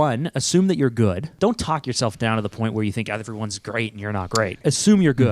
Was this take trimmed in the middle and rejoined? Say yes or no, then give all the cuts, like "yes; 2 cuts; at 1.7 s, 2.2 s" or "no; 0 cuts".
yes; 2 cuts; at 1.3 s, 4.6 s